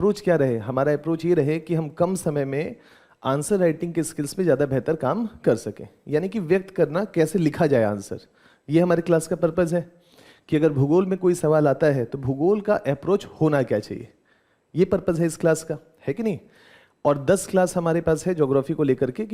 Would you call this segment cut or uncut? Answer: uncut